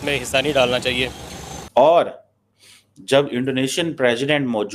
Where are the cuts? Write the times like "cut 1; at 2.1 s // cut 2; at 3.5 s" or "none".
cut 1; at 1.1 s